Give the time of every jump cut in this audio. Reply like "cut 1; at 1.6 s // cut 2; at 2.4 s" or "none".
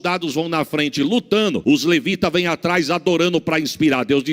cut 1; at 1.6 s